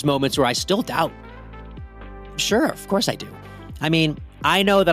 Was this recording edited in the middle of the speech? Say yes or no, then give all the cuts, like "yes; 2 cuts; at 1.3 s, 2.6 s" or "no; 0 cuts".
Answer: yes; 1 cut; at 3.3 s